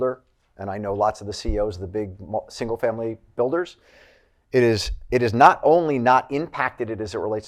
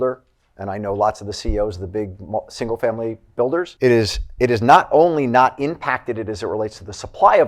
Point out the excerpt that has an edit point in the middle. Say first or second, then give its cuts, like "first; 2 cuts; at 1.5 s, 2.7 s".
second; 1 cut; at 3.7 s